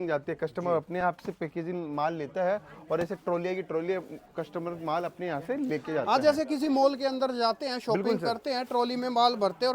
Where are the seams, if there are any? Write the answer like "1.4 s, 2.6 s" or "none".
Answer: none